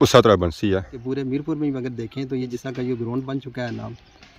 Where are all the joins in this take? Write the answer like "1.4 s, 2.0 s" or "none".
0.9 s, 2.6 s